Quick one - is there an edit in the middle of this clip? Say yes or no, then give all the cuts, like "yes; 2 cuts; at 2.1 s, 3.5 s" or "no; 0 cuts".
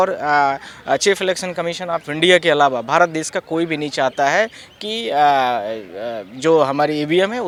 no; 0 cuts